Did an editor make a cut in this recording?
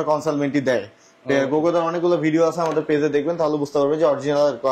no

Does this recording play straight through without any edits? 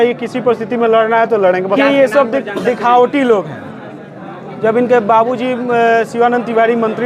no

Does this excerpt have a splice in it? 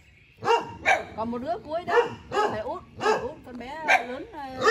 no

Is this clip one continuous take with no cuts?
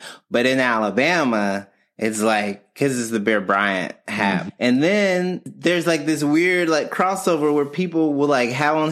no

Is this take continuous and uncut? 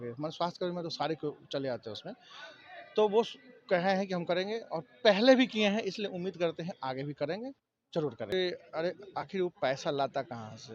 no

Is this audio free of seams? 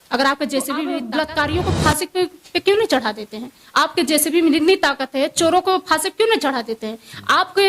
no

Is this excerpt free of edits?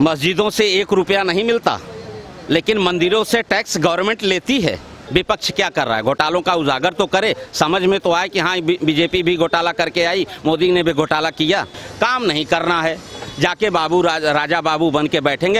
no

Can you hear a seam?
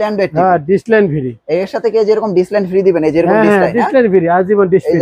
no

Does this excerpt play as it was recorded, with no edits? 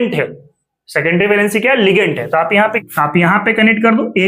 no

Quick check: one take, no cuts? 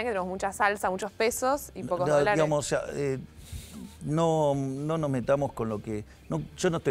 yes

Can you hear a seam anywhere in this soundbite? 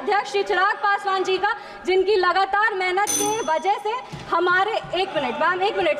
no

